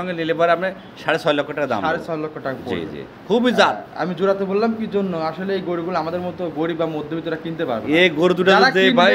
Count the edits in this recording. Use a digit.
0